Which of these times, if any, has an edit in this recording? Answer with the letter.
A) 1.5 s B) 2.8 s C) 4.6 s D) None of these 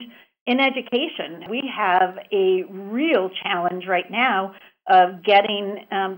A